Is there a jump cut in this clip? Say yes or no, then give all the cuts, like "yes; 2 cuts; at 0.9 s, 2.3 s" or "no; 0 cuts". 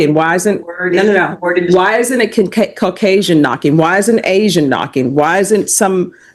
no; 0 cuts